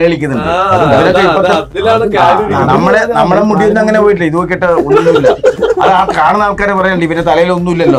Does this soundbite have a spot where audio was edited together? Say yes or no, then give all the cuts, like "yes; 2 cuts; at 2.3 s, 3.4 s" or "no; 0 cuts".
no; 0 cuts